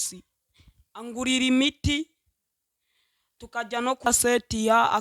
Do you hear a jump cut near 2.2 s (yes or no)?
no